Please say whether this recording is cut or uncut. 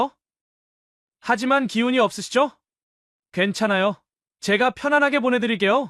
uncut